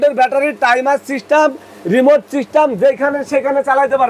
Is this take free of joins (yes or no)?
yes